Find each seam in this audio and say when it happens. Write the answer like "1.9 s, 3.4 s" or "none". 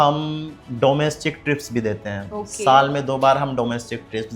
none